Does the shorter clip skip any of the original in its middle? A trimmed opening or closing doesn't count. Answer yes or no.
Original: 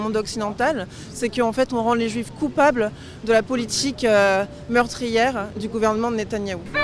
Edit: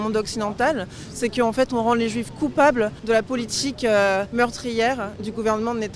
yes